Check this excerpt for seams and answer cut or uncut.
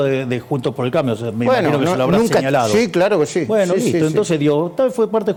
uncut